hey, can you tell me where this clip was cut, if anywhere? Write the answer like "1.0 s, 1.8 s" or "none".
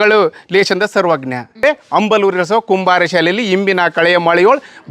1.6 s

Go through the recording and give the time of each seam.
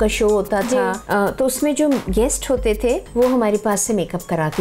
1.0 s, 3.1 s

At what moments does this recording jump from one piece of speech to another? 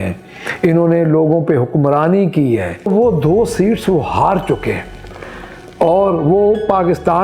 2.9 s

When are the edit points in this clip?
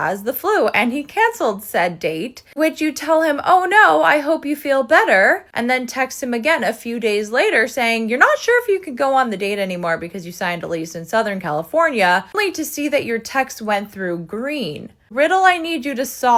none

